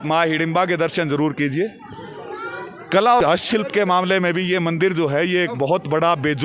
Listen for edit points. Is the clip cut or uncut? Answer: cut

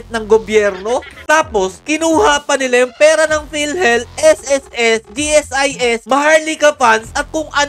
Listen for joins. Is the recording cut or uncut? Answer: cut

